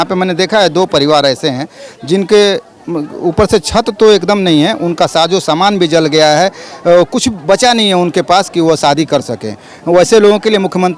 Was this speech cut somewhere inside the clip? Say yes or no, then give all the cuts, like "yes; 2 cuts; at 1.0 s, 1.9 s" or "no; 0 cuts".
no; 0 cuts